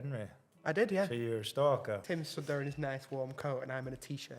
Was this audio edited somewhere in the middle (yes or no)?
yes